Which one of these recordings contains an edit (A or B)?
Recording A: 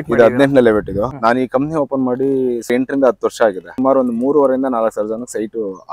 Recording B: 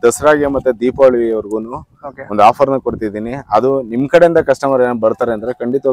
A